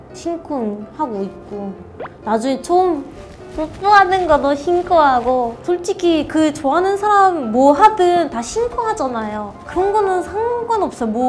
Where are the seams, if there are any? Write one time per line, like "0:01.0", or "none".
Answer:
none